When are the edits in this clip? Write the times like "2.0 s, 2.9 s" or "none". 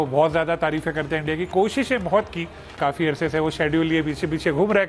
2.7 s